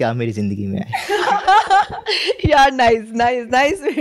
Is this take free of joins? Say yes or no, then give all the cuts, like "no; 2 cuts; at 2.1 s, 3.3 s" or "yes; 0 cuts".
yes; 0 cuts